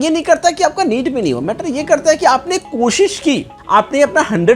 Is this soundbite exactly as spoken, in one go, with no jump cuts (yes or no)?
no